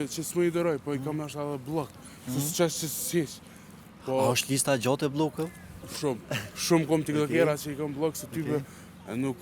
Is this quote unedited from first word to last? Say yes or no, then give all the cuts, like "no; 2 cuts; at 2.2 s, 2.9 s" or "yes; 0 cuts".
yes; 0 cuts